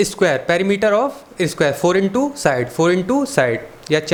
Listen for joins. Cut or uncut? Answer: uncut